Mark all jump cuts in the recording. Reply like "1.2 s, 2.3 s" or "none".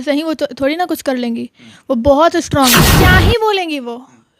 2.9 s